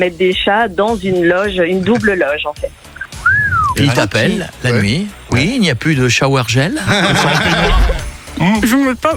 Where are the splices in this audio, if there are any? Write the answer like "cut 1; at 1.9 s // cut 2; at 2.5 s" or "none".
cut 1; at 7.9 s